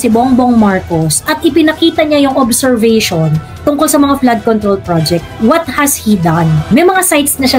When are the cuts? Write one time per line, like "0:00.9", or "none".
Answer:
0:06.7